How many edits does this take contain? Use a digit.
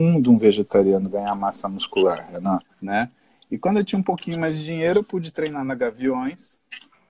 1